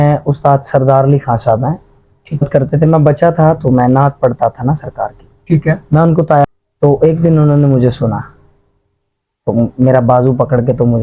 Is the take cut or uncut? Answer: cut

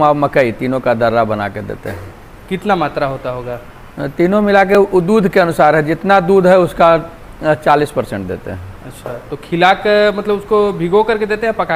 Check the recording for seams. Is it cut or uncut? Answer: uncut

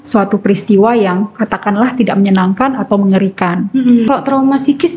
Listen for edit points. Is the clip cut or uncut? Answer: cut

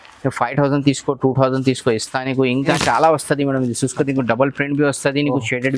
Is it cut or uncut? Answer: cut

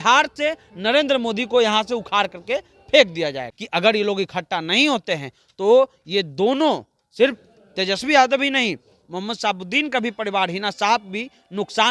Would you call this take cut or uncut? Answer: cut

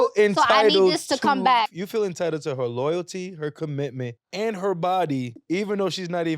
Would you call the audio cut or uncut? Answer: cut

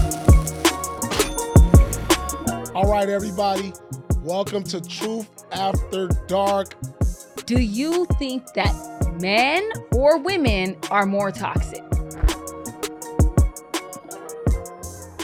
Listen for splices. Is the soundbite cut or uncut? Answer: uncut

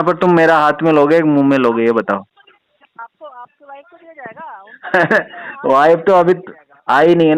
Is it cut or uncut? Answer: uncut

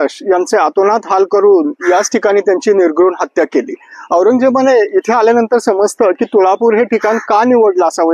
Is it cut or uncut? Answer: uncut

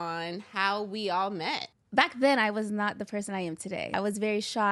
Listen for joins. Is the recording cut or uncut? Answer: cut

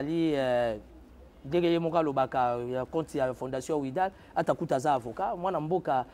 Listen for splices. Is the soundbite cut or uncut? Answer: uncut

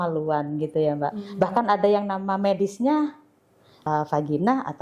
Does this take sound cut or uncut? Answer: cut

